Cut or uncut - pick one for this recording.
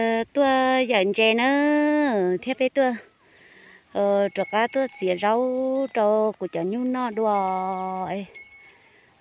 uncut